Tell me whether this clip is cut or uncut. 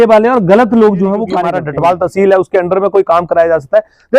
cut